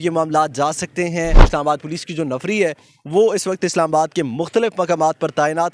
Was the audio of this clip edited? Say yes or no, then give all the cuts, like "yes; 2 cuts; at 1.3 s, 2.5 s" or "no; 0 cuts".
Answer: yes; 1 cut; at 1.4 s